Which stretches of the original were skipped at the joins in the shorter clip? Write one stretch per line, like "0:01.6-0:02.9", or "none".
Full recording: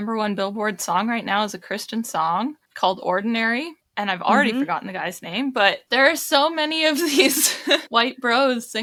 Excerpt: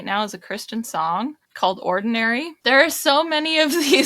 0:03.8-0:05.8